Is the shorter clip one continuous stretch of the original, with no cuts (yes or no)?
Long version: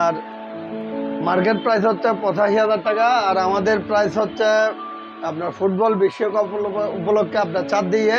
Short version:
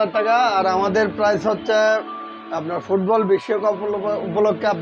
yes